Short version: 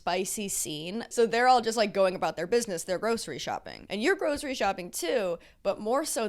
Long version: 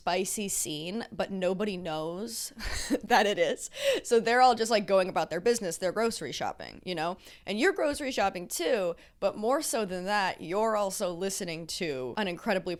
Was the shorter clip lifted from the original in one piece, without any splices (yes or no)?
no